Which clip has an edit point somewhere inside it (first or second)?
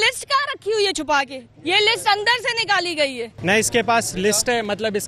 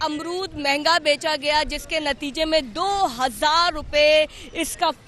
first